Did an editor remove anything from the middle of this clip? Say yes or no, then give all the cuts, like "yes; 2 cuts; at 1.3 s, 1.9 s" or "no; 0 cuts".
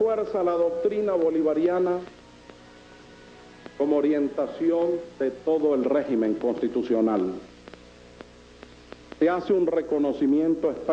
no; 0 cuts